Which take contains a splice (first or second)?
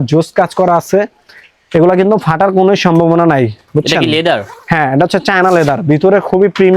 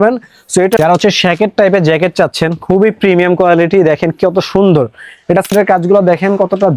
second